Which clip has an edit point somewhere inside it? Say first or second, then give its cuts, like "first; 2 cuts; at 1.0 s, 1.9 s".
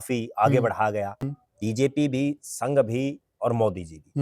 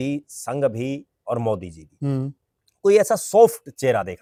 first; 1 cut; at 1.2 s